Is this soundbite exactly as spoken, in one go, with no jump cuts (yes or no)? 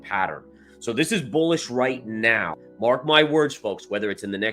no